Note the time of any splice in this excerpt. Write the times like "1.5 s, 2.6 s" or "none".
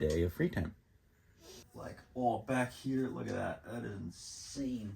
1.6 s